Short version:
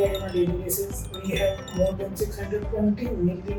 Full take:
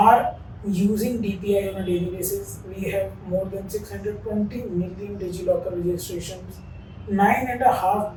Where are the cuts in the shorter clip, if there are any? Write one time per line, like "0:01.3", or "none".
none